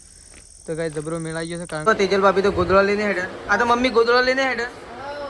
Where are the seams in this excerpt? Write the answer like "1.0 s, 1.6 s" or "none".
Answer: 1.9 s